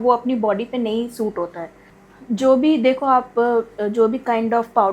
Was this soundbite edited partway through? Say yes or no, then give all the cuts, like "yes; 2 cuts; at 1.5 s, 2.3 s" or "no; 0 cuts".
no; 0 cuts